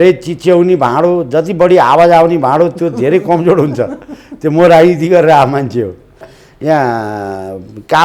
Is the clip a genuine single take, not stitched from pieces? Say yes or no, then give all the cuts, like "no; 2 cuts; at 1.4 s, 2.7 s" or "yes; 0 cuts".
no; 1 cut; at 6.3 s